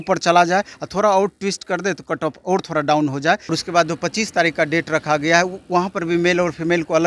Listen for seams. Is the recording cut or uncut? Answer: cut